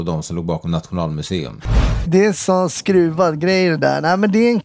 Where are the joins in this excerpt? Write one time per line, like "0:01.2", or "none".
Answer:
0:02.1